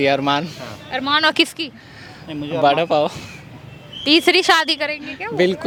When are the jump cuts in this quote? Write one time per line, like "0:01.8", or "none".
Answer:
none